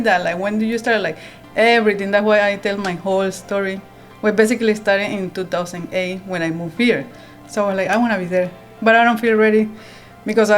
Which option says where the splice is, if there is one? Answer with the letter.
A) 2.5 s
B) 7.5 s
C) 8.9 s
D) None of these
B